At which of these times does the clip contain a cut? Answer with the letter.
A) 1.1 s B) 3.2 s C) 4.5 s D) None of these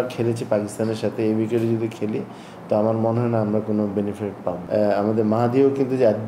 C